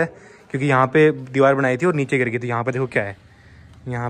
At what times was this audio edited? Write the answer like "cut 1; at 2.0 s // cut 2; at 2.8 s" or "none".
none